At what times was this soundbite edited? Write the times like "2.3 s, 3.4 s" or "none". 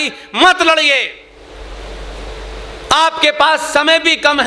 1.3 s

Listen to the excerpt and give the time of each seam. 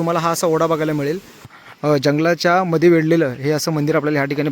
1.5 s

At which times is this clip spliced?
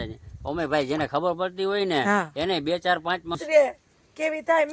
3.4 s

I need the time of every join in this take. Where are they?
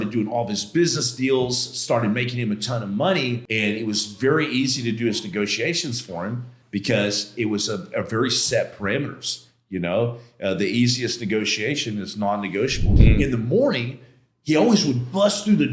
3.4 s, 6.5 s, 12.9 s

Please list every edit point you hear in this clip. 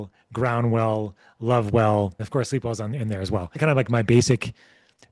2.2 s, 3.6 s

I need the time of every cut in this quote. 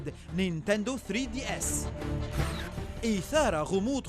1.5 s

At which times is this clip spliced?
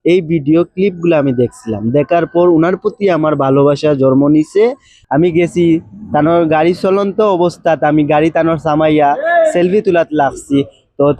5.0 s

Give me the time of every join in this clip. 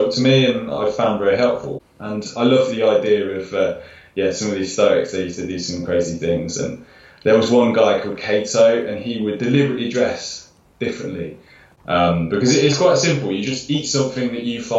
1.7 s, 11.6 s

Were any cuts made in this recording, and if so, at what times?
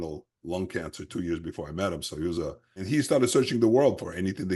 2.8 s

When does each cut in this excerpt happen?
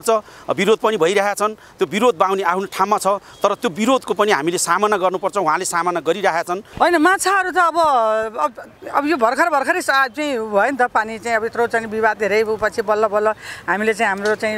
6.6 s

